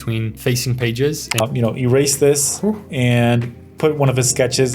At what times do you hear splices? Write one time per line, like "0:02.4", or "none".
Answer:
0:01.4